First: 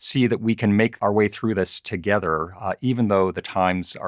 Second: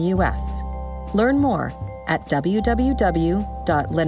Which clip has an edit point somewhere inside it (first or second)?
first